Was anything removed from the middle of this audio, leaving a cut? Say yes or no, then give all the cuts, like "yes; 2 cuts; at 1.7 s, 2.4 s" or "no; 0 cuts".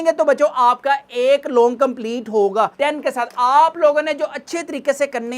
yes; 1 cut; at 2.7 s